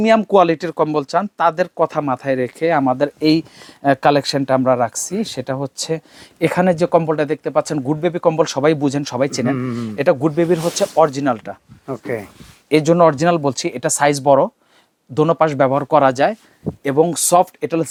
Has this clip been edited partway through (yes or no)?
no